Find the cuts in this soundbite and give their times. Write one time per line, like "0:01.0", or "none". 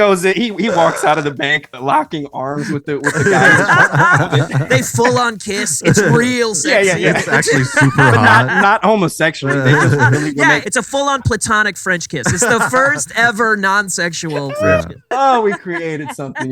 0:10.6
0:15.0